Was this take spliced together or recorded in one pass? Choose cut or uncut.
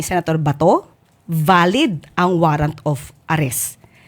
uncut